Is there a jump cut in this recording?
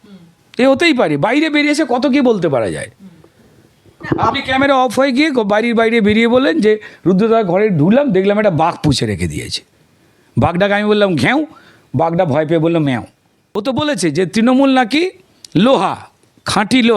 yes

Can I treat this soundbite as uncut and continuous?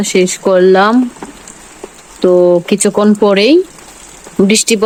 yes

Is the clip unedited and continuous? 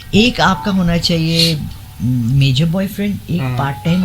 yes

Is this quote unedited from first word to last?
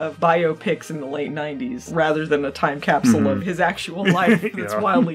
yes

